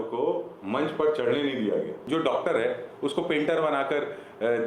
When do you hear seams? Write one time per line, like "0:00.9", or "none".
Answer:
0:02.1

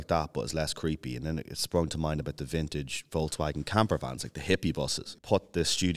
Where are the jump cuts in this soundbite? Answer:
0:05.0

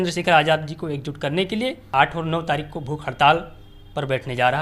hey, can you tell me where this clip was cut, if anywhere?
0:01.8

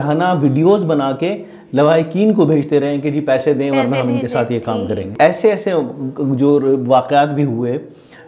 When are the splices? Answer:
0:05.1

